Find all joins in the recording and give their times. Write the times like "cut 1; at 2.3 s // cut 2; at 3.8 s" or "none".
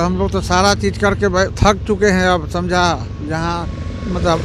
none